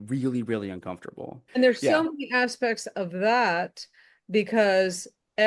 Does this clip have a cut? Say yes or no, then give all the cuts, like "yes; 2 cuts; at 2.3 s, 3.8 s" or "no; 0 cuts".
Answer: yes; 1 cut; at 1.3 s